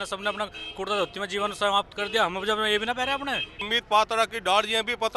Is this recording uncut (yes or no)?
no